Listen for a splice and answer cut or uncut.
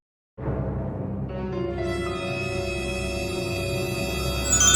uncut